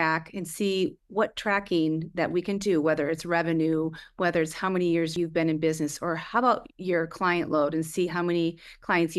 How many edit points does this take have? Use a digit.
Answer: 2